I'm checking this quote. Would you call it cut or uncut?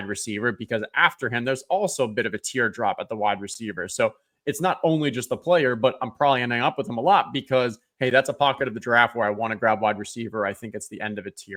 uncut